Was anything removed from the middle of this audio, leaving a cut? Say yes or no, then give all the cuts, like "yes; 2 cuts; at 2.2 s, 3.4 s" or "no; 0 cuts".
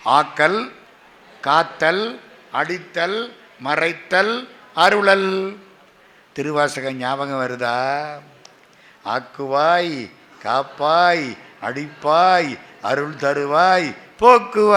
no; 0 cuts